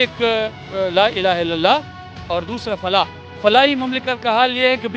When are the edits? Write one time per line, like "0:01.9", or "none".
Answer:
0:03.2

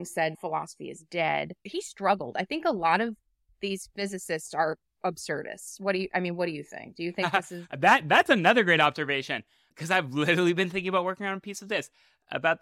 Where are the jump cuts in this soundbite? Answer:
0:01.6

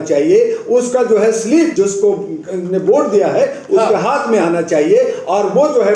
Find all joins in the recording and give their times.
0:01.7

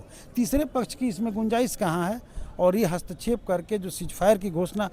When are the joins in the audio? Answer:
none

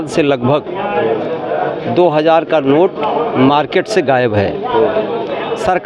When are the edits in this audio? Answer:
none

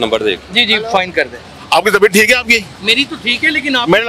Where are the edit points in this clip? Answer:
0:01.5

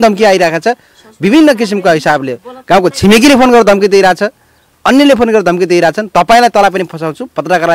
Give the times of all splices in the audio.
none

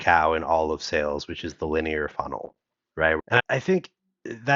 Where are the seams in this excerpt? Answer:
0:03.2

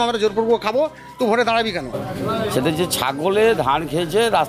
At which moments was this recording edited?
0:02.0

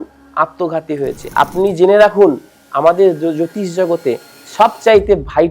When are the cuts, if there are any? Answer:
0:01.2

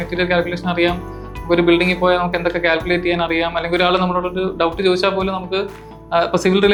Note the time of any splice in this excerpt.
none

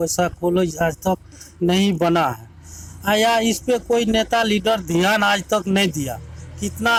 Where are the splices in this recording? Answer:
none

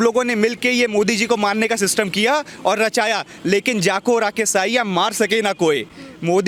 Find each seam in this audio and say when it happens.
none

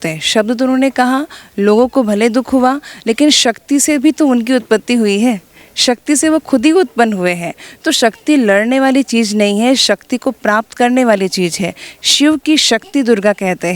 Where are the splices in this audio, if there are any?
none

